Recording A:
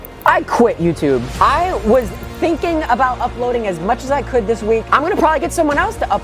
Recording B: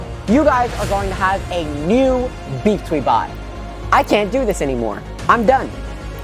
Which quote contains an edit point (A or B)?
A